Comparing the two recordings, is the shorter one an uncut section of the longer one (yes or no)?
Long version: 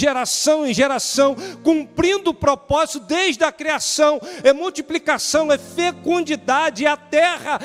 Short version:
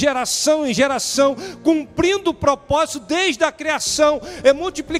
yes